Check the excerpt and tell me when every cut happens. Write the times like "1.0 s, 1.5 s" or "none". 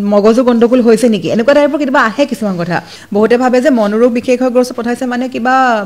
2.9 s